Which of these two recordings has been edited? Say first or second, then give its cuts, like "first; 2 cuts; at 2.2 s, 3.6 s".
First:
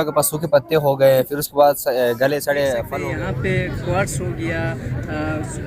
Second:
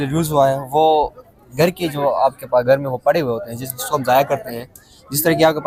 first; 1 cut; at 2.9 s